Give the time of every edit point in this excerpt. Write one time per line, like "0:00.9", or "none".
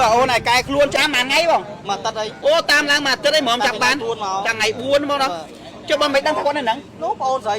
0:01.0